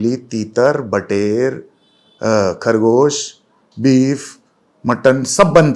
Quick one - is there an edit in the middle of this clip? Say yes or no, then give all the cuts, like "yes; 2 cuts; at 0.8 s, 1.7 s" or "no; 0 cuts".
no; 0 cuts